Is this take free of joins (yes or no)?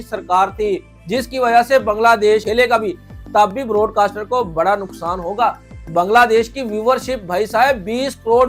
no